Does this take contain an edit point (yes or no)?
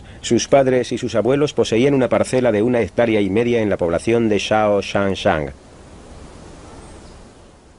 yes